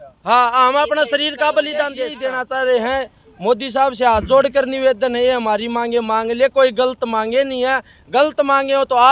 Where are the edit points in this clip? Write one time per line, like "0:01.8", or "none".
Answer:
0:02.1